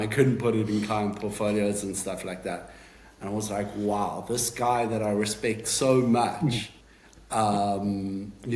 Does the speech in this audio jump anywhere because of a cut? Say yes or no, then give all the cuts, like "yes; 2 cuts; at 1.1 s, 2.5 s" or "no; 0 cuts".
no; 0 cuts